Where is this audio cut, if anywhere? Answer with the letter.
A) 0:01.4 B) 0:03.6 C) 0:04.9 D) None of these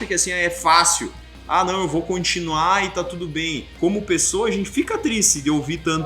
B